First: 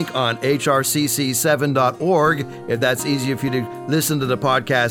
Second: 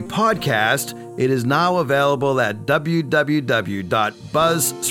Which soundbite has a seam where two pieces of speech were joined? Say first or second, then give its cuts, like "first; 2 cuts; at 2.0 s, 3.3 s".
second; 1 cut; at 1.0 s